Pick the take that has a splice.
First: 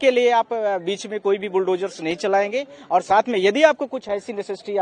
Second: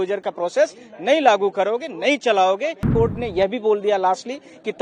second; 1 cut; at 2.8 s

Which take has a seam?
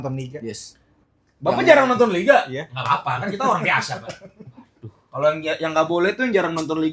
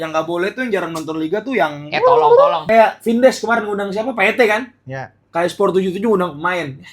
second; 1 cut; at 2.6 s

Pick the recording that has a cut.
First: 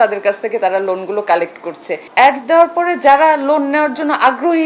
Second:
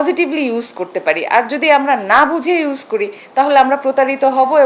first; 1 cut; at 1.9 s

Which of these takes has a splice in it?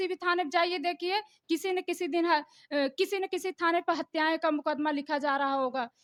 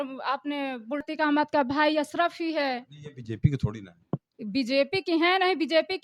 second; 1 cut; at 1.0 s

